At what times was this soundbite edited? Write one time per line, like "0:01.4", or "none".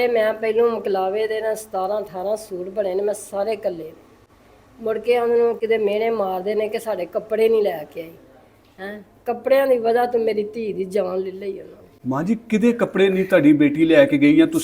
none